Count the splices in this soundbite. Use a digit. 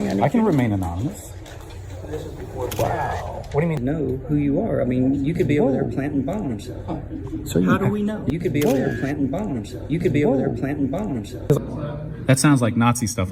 2